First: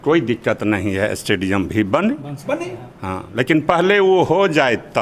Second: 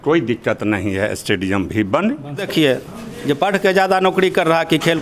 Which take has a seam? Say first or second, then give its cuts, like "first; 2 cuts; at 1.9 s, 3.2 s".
second; 1 cut; at 2.4 s